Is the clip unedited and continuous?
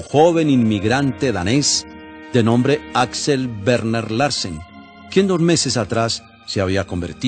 yes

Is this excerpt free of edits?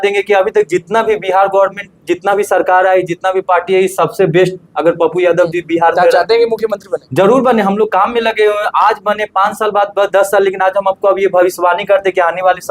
yes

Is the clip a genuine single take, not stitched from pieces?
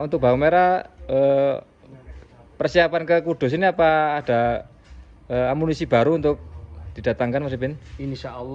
yes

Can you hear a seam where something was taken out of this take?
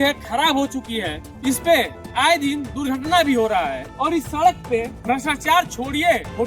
no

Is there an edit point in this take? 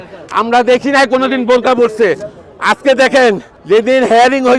yes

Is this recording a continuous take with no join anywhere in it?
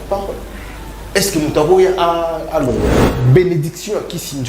no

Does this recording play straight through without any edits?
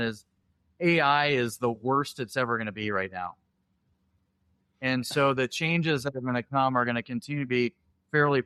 yes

